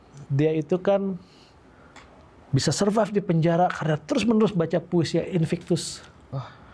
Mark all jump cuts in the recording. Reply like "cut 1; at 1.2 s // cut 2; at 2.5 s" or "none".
none